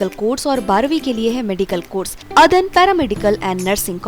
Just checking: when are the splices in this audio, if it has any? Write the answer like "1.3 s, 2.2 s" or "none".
2.2 s